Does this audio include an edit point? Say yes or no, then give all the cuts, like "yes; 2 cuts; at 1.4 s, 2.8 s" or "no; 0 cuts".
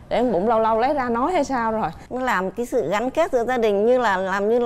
yes; 1 cut; at 2.0 s